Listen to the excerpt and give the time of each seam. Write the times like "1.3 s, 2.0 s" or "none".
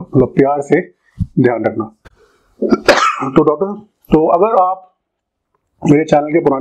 none